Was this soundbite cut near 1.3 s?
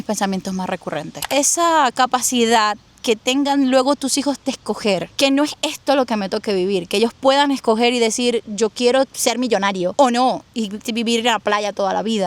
yes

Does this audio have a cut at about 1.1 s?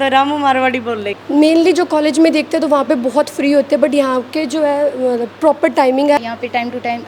yes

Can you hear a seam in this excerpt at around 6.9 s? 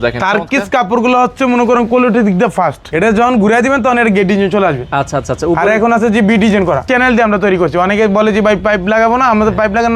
yes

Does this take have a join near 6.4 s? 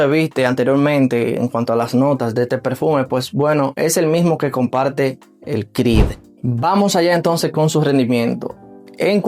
yes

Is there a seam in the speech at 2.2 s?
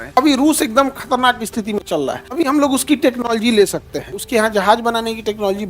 yes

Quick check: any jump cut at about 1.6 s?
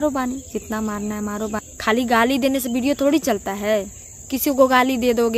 yes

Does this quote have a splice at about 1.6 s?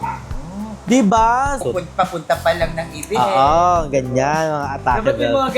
yes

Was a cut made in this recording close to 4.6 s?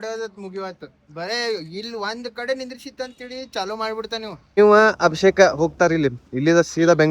yes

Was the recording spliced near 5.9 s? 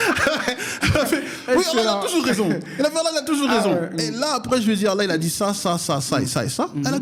no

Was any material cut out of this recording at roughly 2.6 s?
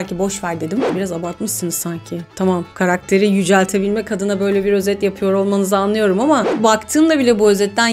no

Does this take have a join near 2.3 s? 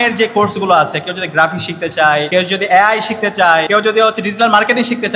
yes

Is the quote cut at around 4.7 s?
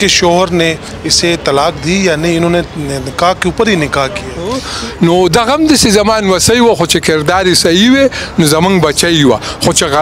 yes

